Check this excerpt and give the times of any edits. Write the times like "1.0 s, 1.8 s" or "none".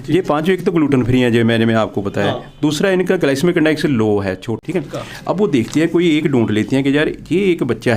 4.5 s